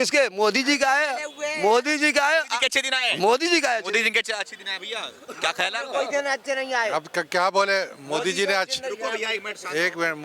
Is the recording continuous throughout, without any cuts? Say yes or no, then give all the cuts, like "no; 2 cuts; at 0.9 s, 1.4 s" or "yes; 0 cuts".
yes; 0 cuts